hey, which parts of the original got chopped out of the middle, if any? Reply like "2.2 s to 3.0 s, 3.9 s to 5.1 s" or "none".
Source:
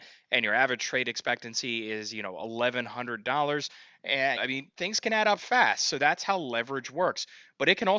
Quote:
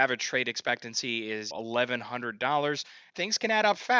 2.1 s to 2.4 s, 3.9 s to 4.6 s